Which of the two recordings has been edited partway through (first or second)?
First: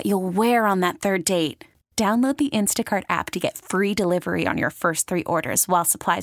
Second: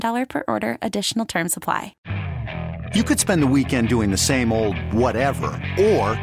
second